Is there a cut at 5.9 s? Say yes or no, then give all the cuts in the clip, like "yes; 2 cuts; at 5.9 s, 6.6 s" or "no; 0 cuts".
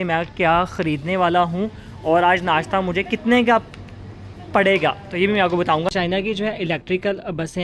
yes; 1 cut; at 5.9 s